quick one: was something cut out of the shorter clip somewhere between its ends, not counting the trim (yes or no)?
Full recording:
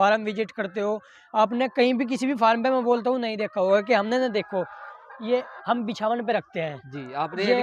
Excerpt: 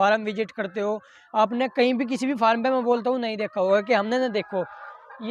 no